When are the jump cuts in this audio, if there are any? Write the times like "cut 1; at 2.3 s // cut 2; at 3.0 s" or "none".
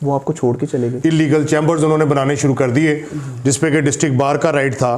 cut 1; at 1.0 s